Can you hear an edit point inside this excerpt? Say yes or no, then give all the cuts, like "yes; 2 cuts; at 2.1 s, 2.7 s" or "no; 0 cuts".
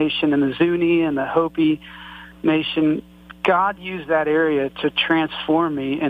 no; 0 cuts